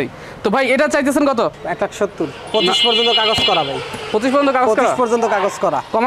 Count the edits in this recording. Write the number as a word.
one